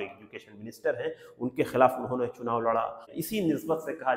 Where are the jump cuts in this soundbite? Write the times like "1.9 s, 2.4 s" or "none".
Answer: 3.1 s